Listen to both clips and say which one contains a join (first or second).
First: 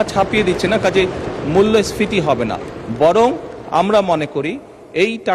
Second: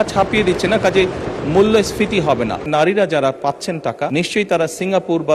second